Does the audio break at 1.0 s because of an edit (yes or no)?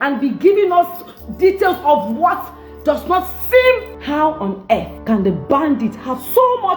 no